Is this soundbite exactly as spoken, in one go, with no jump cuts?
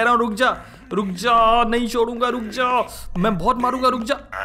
yes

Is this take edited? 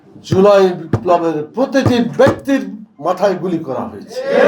no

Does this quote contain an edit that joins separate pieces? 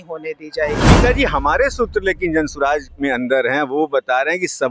yes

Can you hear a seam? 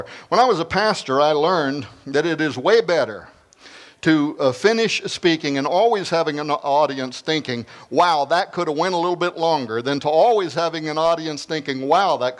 no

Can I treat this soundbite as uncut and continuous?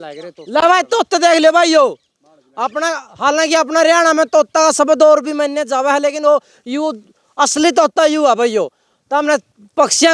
yes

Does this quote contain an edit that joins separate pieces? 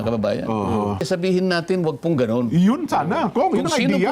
yes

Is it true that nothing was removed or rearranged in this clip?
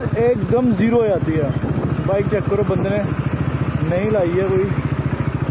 yes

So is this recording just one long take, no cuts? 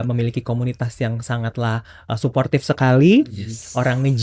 yes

